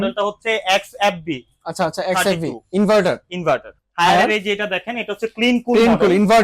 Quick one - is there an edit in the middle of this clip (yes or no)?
yes